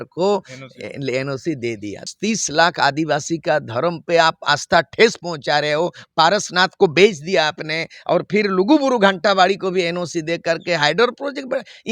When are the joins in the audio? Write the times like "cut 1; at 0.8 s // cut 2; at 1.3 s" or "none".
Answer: cut 1; at 2.1 s